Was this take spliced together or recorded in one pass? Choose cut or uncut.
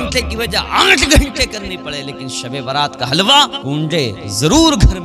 cut